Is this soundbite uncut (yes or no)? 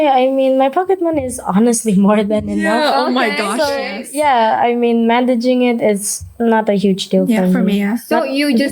yes